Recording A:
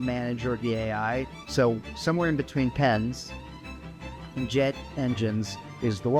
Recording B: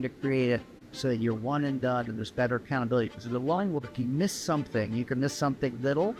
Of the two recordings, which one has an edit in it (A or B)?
A